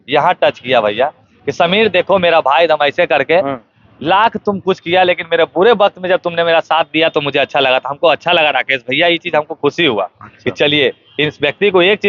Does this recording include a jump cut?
no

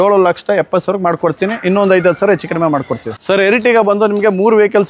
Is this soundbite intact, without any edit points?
no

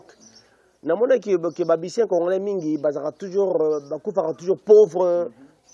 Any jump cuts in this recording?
no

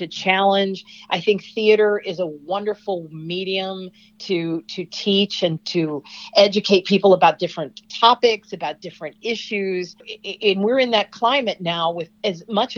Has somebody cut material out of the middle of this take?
no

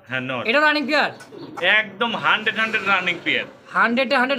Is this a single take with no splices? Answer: yes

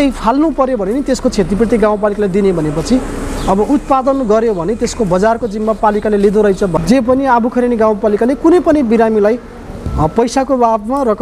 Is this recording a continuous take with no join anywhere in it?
no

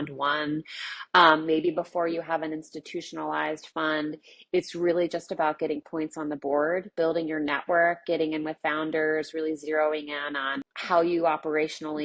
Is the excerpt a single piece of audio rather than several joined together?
no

